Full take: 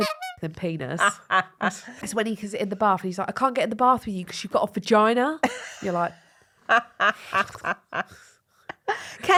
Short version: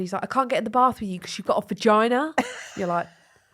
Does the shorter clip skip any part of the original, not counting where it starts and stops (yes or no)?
no